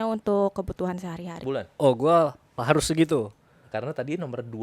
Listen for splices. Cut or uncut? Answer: cut